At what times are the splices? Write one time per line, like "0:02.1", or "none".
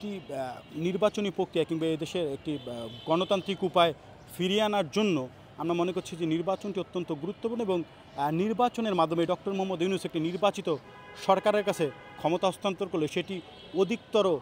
none